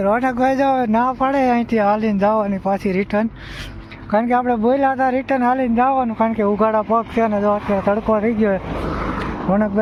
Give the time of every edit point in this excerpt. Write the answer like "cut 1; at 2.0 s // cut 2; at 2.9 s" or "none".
none